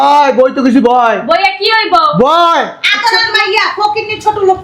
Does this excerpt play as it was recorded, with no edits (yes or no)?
yes